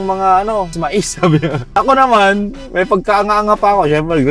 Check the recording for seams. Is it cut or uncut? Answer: uncut